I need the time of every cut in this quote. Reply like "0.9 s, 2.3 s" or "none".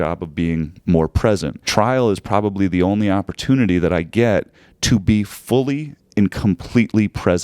1.7 s